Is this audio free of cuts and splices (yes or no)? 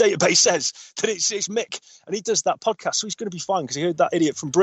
yes